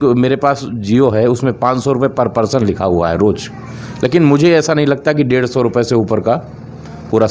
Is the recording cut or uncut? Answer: uncut